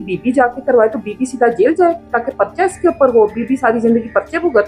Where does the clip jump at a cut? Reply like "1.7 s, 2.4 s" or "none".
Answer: none